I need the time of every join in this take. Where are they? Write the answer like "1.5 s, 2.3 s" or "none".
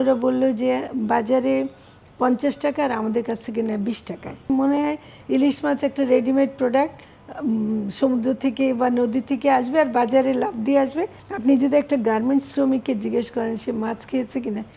4.5 s, 11.2 s